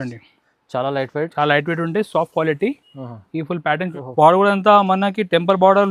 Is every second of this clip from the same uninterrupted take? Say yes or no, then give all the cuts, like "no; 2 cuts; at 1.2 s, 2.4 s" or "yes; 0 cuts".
no; 1 cut; at 3.9 s